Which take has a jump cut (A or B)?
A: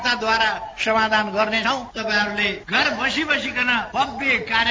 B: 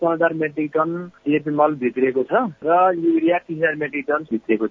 A